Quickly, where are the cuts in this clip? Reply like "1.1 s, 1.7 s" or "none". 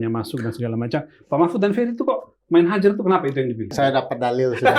3.7 s

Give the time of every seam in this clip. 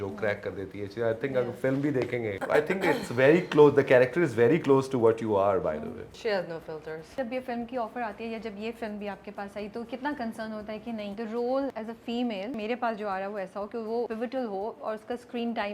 2.4 s, 6.1 s, 7.1 s, 11.1 s, 12.2 s, 14.1 s

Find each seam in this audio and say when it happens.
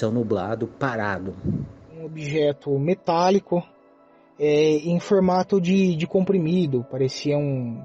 2.2 s

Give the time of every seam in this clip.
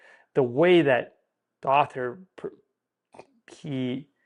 none

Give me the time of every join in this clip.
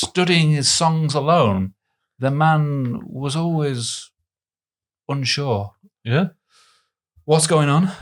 none

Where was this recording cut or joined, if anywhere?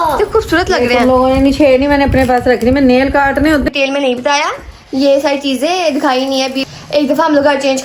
3.7 s, 6.6 s

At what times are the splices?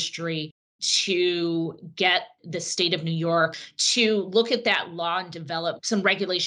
3.6 s

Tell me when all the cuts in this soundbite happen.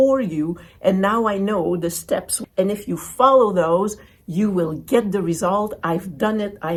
none

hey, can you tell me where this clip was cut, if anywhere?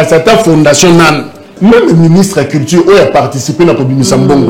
1.5 s

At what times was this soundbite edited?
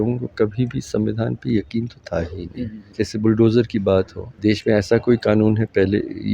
2.8 s, 4.2 s

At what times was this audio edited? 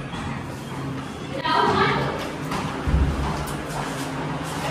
none

